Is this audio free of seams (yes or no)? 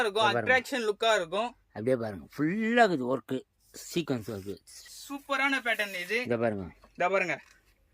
no